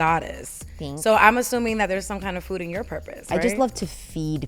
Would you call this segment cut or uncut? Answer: cut